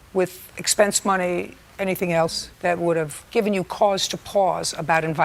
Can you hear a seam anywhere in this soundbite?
no; 0 cuts

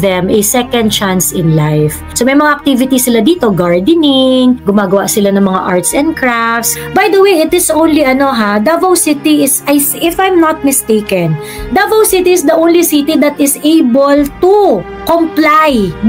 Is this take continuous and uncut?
no; 3 cuts; at 2.0 s, 4.6 s, 6.6 s

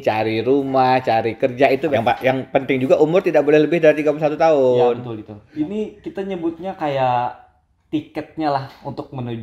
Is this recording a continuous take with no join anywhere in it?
no; 2 cuts; at 1.9 s, 5.3 s

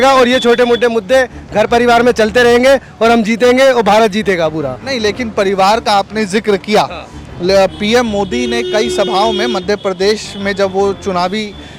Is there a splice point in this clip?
no; 0 cuts

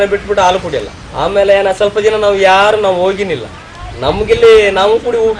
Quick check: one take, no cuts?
yes; 0 cuts

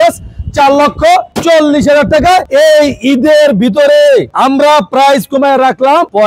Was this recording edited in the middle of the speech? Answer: no; 0 cuts

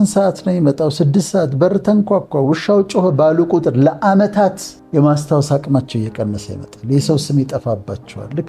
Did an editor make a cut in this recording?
yes; 1 cut; at 4.7 s

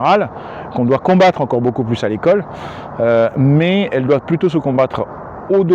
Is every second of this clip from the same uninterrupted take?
yes; 0 cuts

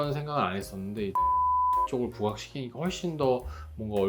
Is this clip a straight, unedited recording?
yes; 0 cuts

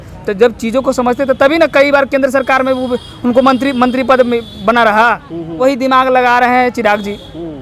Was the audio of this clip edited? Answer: yes; 1 cut; at 5.5 s

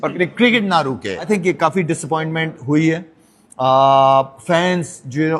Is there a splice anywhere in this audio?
yes; 1 cut; at 1.3 s

